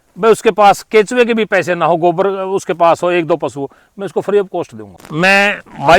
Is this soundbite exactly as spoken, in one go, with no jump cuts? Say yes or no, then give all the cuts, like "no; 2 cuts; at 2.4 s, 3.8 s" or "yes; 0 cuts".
no; 1 cut; at 5.1 s